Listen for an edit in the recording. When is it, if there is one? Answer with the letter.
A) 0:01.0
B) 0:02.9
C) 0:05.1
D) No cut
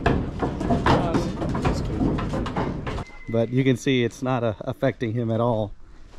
B